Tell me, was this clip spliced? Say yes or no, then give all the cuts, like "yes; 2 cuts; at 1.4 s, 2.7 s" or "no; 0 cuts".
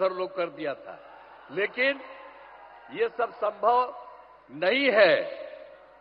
no; 0 cuts